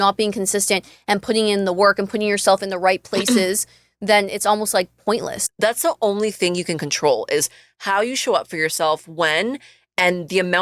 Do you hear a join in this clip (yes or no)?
yes